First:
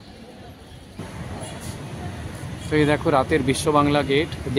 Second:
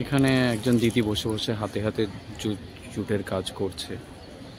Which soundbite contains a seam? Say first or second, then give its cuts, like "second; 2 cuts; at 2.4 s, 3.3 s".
first; 1 cut; at 1.0 s